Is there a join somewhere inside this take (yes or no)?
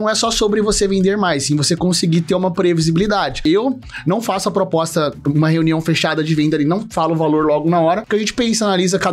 yes